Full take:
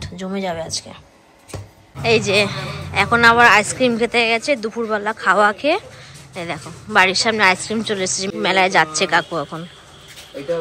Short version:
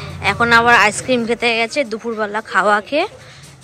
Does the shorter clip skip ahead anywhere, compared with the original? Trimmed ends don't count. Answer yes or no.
no